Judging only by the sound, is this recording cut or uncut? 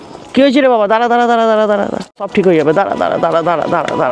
cut